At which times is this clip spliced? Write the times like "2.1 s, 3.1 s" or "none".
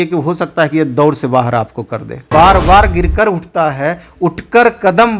2.1 s